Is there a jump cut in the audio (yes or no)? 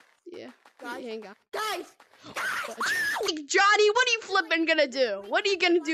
yes